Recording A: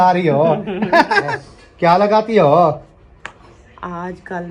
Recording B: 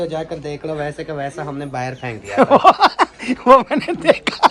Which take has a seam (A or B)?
A